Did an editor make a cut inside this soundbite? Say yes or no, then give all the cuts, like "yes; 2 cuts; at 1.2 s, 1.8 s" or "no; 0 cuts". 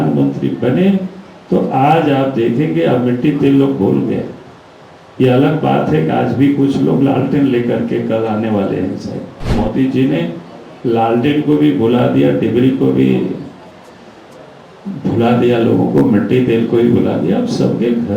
yes; 1 cut; at 9.5 s